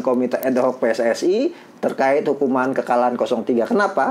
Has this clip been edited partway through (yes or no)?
no